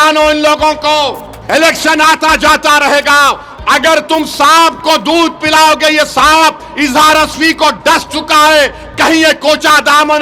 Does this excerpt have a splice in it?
yes; 2 cuts; at 1.3 s, 3.5 s

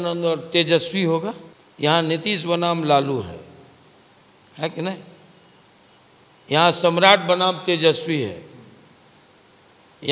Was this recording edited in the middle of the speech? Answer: no; 0 cuts

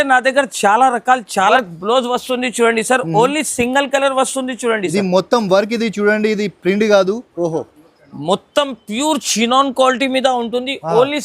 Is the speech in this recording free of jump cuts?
no; 1 cut; at 1.5 s

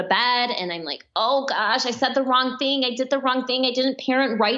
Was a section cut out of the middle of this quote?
no; 0 cuts

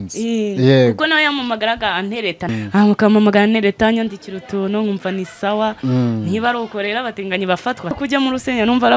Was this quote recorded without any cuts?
no; 2 cuts; at 2.5 s, 8.0 s

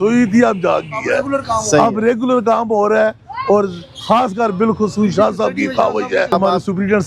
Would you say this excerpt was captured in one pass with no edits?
yes; 0 cuts

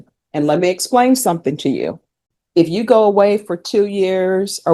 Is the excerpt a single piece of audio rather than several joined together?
no; 1 cut; at 2.3 s

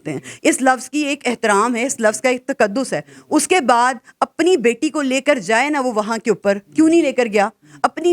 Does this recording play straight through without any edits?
yes; 0 cuts

